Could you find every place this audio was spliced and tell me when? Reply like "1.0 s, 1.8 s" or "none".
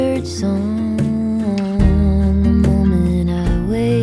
none